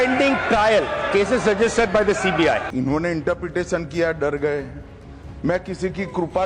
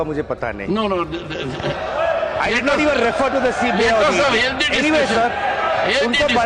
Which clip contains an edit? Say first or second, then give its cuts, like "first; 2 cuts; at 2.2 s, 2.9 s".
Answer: first; 1 cut; at 2.7 s